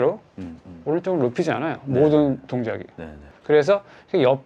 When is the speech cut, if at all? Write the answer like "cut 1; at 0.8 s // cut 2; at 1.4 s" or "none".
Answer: cut 1; at 3.3 s